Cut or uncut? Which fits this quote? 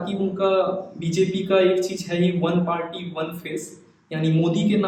uncut